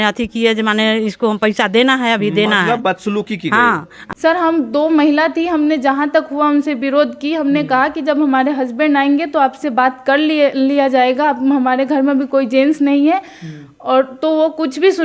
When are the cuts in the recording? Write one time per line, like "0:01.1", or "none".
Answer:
0:03.9